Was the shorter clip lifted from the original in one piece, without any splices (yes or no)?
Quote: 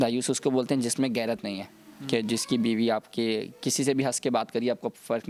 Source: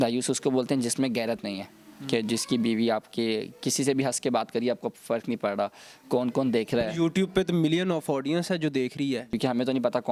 yes